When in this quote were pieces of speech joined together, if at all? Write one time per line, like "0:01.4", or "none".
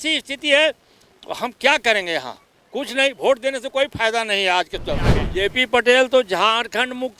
0:05.2

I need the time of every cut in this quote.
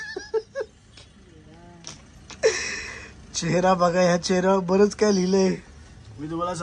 none

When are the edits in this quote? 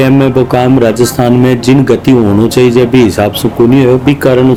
none

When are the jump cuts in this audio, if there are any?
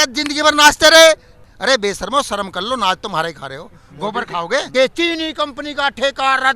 0:01.5
0:04.7

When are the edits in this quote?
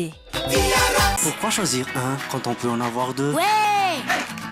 0:01.2

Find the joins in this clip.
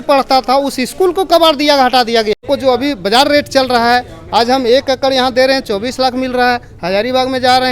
0:02.4

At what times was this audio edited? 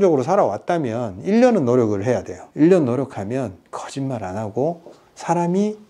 none

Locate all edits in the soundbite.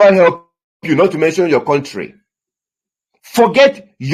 none

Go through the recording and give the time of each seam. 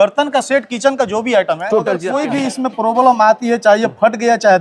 0:02.1

